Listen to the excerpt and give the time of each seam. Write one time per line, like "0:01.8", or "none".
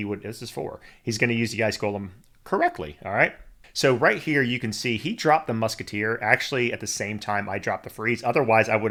none